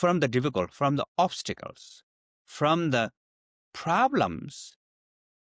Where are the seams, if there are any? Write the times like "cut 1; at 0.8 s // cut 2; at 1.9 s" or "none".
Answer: none